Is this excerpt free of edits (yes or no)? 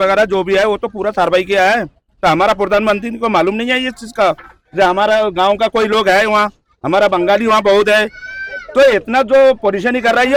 yes